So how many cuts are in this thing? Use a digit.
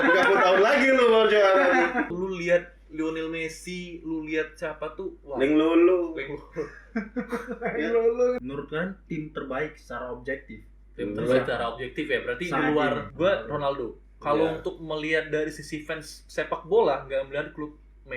3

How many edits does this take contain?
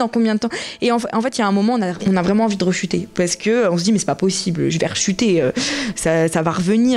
0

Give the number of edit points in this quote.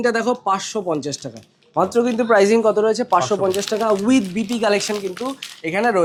0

